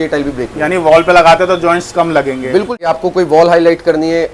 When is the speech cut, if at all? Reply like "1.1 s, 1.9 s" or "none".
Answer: 2.7 s